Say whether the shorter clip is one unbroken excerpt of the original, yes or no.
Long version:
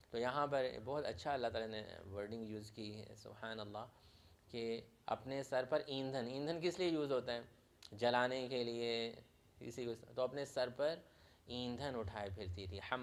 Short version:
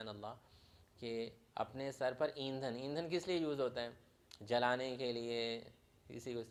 yes